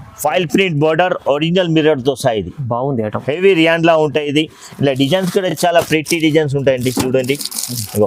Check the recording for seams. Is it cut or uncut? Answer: uncut